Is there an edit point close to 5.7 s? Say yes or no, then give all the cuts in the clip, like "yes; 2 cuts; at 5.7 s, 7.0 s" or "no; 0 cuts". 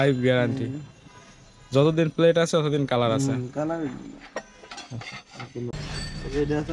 yes; 1 cut; at 5.7 s